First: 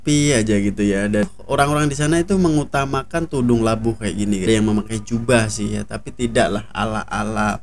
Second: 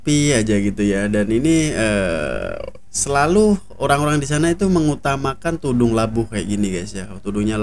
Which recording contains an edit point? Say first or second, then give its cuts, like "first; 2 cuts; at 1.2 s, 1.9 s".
first; 2 cuts; at 1.3 s, 4.5 s